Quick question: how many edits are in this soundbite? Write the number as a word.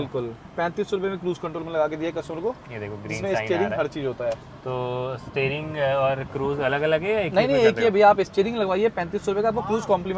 zero